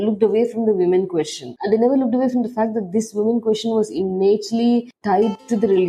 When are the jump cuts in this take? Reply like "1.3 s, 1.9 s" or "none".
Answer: 1.5 s, 4.9 s